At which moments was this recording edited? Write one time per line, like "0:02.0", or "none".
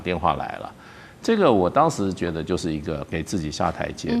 none